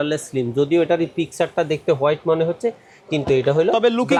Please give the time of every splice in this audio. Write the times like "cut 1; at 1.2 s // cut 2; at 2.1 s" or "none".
none